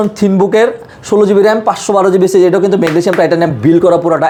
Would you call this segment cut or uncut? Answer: uncut